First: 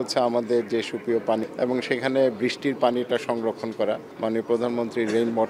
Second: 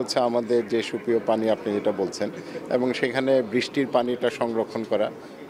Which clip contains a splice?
first; 2 cuts; at 1.4 s, 4.1 s

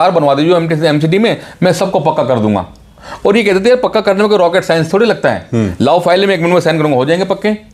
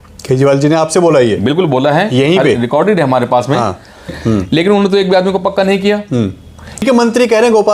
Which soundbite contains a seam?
second; 2 cuts; at 4.2 s, 6.8 s

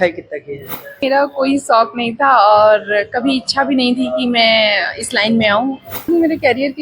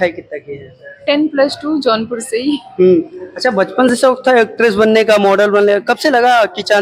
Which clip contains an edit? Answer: first; 2 cuts; at 1.0 s, 6.0 s

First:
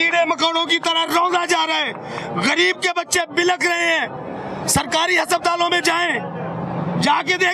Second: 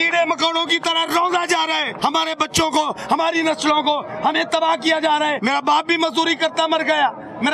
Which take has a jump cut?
second; 2 cuts; at 1.9 s, 5.4 s

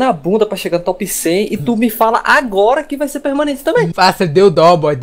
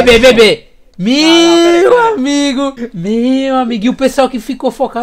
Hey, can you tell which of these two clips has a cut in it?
first; 1 cut; at 3.9 s

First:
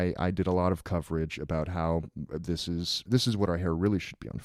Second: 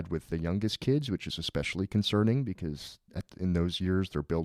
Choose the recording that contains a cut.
first; 1 cut; at 3.1 s

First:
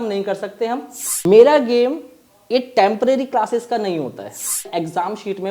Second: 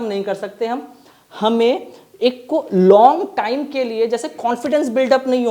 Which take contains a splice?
first; 2 cuts; at 1.2 s, 4.6 s

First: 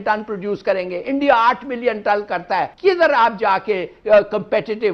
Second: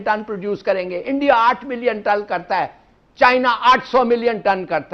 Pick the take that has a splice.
first; 1 cut; at 2.7 s

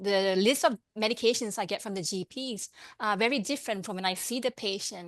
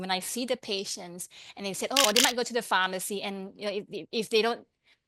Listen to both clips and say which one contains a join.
second; 1 cut; at 2.0 s

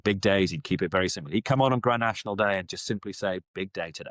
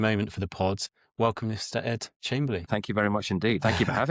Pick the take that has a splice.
second; 2 cuts; at 0.9 s, 2.7 s

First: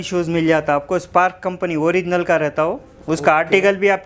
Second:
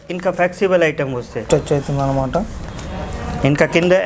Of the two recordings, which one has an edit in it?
second; 1 cut; at 1.4 s

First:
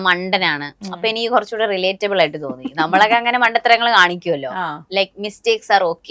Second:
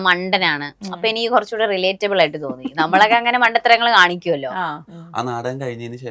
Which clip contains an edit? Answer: second; 1 cut; at 4.8 s

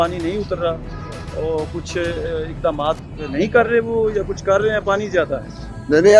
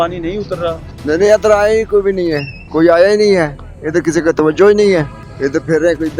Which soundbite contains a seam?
second; 2 cuts; at 0.9 s, 5.2 s

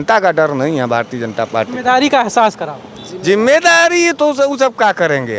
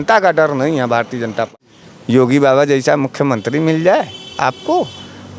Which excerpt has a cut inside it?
second; 1 cut; at 1.5 s

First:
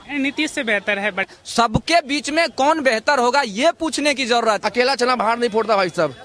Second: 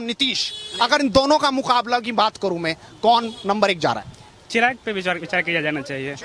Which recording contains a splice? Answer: first; 2 cuts; at 1.3 s, 4.6 s

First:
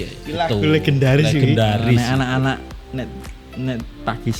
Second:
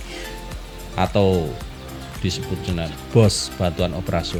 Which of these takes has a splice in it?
first; 1 cut; at 1.9 s

